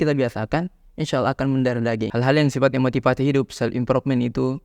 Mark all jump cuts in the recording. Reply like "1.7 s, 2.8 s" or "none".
2.1 s